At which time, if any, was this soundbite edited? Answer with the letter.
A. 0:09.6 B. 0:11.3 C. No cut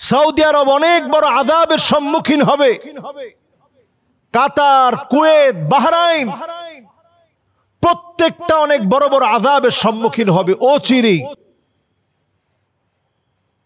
C